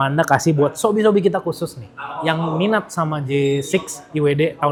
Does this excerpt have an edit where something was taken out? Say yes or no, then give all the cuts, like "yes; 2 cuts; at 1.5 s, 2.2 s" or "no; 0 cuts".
no; 0 cuts